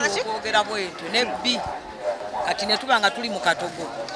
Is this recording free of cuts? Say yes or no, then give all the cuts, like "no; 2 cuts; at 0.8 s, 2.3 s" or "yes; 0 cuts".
no; 1 cut; at 2.2 s